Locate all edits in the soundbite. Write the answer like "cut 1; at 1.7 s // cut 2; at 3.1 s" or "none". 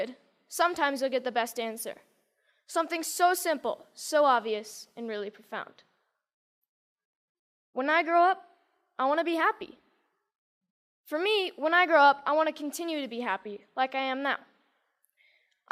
cut 1; at 1.7 s